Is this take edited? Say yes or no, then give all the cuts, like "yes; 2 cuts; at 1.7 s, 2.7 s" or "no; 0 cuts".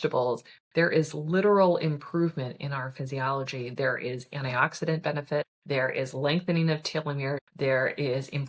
yes; 2 cuts; at 5.6 s, 7.5 s